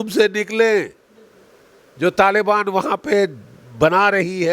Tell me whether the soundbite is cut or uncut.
uncut